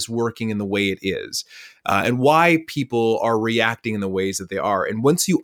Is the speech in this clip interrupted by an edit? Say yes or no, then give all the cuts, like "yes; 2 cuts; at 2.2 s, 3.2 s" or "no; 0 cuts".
no; 0 cuts